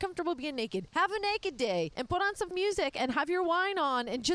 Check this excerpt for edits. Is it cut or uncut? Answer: cut